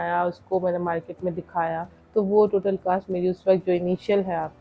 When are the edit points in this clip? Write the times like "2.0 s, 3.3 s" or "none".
1.9 s